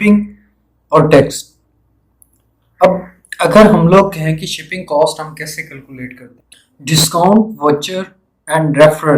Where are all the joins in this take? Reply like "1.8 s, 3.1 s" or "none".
6.4 s